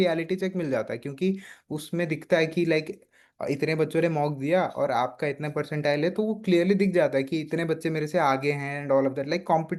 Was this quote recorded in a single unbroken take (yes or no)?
yes